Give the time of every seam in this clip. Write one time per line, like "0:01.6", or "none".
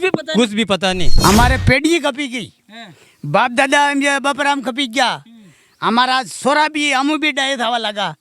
0:01.1